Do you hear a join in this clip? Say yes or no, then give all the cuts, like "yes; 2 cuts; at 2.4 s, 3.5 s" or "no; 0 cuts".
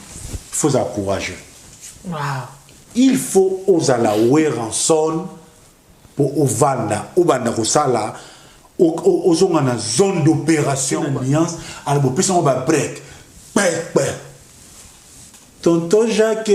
yes; 1 cut; at 10.9 s